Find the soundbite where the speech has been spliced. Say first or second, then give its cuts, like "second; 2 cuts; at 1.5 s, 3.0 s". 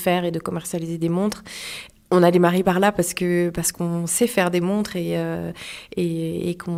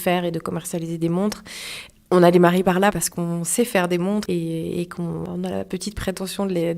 second; 3 cuts; at 2.9 s, 4.2 s, 5.2 s